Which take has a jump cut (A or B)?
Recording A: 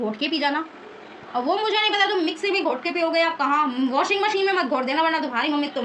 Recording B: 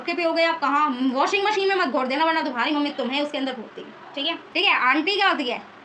B